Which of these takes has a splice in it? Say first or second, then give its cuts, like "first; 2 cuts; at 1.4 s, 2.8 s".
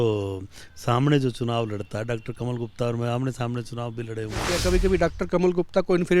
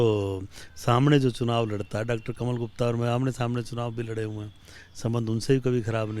first; 1 cut; at 4.5 s